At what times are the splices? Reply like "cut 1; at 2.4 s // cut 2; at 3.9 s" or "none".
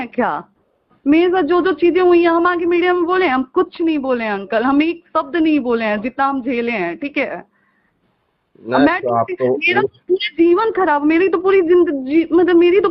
none